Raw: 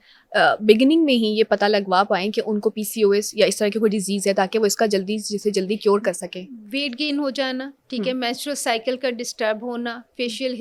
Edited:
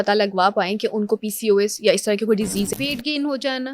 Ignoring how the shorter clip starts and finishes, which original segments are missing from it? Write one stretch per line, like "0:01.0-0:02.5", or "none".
0:04.2-0:06.6

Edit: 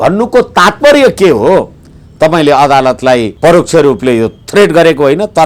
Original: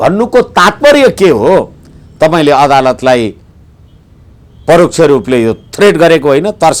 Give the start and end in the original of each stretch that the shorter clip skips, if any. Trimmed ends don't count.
0:03.3-0:04.6

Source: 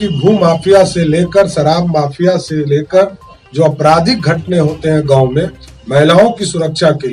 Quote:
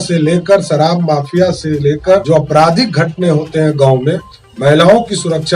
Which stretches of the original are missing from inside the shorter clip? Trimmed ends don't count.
0:03.1-0:03.5

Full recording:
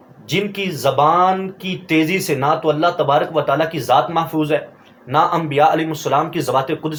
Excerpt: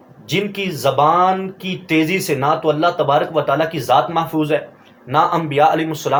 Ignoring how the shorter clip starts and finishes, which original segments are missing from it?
none

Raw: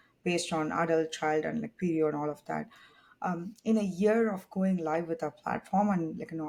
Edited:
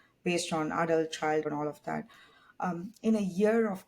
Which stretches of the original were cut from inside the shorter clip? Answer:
0:01.5-0:02.1

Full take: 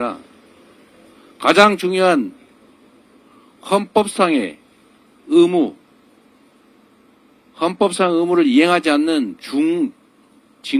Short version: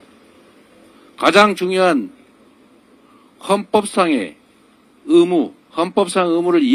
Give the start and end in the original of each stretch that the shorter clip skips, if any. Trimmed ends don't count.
0:05.8-0:07.4

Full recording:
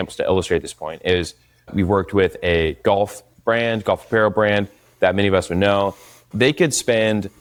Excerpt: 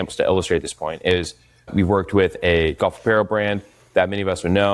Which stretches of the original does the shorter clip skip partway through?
0:02.8-0:03.8

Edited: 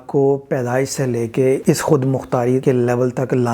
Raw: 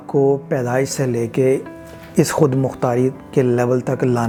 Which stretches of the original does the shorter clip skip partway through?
0:01.6-0:02.1
0:03.1-0:03.3

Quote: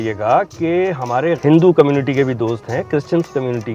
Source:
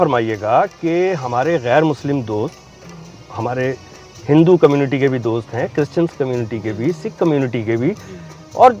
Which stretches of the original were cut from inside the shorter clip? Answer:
0:01.6-0:04.2

